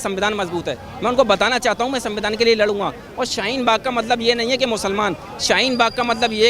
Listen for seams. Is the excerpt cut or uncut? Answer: uncut